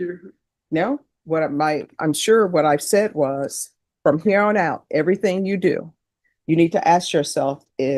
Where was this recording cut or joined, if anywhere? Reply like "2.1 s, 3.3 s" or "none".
none